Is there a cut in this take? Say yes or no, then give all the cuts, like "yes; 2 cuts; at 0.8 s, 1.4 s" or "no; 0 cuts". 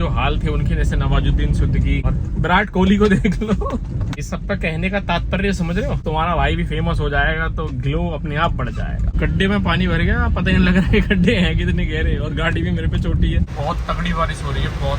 yes; 5 cuts; at 2.0 s, 4.1 s, 6.0 s, 9.2 s, 13.5 s